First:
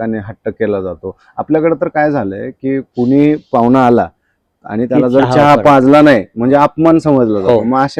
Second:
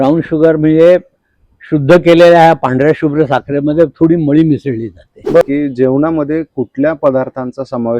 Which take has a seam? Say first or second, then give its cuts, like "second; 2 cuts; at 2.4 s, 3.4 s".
second; 1 cut; at 5.4 s